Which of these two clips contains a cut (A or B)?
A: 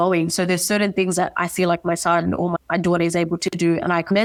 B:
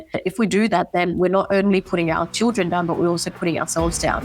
B